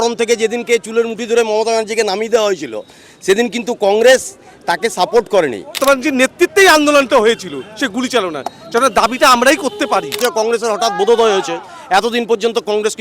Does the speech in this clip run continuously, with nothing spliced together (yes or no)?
no